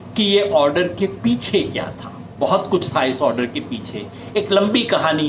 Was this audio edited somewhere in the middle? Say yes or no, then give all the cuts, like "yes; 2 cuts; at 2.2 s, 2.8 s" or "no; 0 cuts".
no; 0 cuts